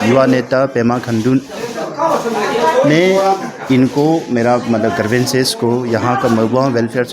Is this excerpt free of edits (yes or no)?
yes